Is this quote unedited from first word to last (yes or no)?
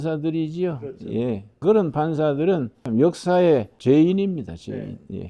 no